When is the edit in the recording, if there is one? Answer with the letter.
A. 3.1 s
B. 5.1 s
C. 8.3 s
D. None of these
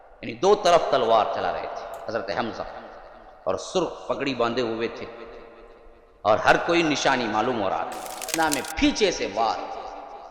C